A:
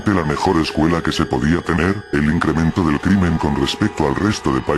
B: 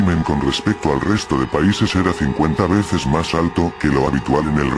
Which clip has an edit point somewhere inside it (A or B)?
A